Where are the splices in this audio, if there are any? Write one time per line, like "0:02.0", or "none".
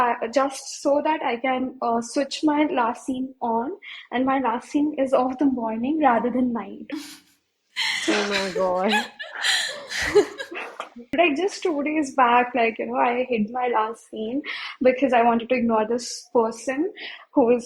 0:11.1